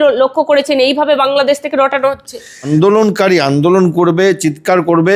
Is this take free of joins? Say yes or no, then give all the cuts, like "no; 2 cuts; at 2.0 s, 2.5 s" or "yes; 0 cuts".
no; 1 cut; at 2.7 s